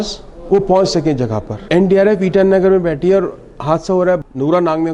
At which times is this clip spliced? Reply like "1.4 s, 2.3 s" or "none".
1.5 s, 4.2 s

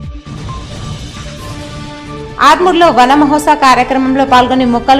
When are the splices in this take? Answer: 0.9 s

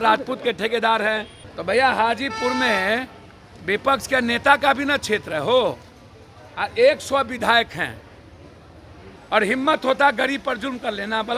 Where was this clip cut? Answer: 1.4 s, 9.2 s

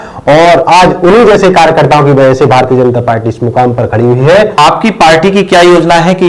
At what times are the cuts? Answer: 4.5 s

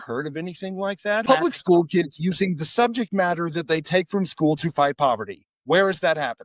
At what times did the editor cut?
1.2 s

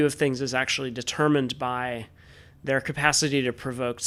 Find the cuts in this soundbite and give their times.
none

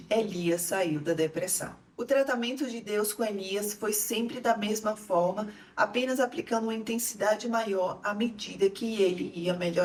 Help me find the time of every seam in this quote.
none

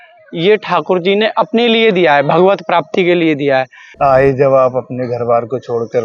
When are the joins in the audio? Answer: 3.8 s

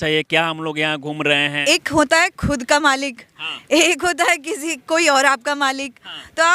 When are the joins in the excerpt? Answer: 1.6 s

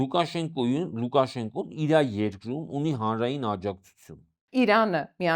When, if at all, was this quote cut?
4.4 s

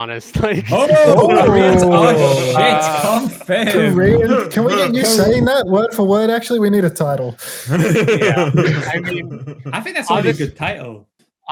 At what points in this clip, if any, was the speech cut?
none

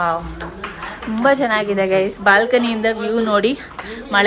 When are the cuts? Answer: none

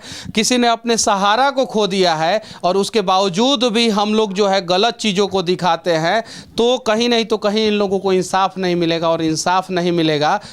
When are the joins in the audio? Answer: none

